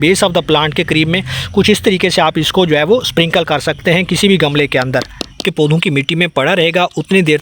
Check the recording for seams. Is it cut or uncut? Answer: cut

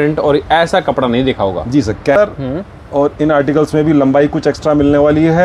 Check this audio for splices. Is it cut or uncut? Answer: cut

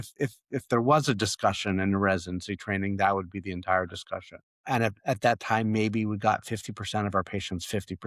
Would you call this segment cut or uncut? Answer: cut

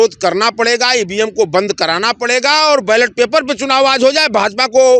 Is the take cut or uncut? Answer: uncut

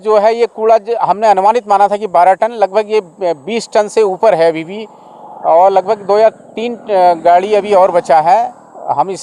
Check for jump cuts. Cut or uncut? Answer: uncut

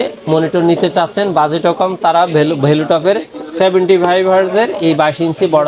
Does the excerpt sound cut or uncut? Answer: uncut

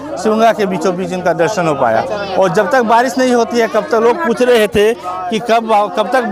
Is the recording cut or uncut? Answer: uncut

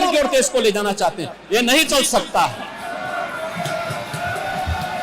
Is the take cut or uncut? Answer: uncut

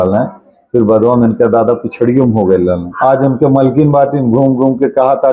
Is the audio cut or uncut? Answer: cut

